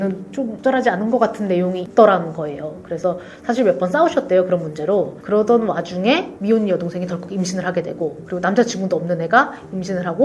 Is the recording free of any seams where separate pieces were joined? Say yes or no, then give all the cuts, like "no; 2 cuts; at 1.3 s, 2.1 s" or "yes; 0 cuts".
yes; 0 cuts